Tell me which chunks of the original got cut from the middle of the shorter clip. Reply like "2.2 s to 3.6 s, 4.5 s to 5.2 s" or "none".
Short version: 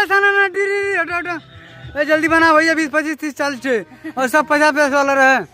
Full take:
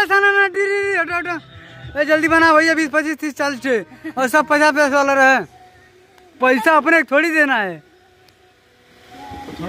none